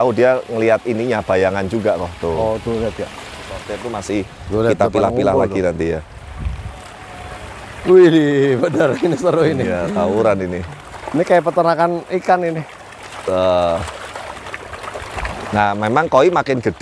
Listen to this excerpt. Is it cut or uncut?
cut